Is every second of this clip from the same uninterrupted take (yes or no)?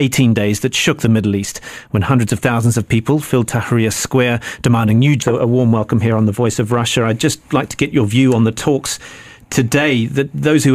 yes